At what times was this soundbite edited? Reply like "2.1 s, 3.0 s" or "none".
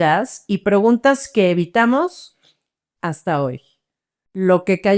none